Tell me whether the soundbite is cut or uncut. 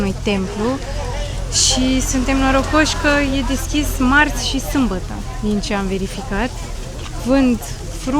uncut